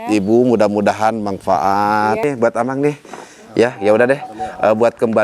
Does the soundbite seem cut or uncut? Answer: cut